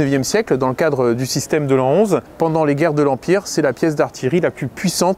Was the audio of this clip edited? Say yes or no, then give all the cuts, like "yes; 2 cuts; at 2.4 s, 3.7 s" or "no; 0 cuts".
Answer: no; 0 cuts